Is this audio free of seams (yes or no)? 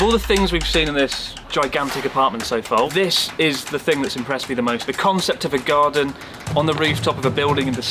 no